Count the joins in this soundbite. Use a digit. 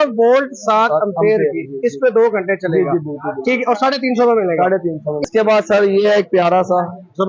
1